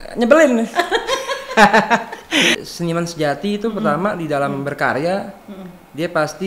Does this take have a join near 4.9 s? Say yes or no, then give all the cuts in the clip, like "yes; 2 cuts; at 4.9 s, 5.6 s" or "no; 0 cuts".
no; 1 cut; at 2.6 s